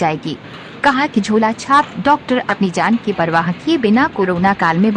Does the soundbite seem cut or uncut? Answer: cut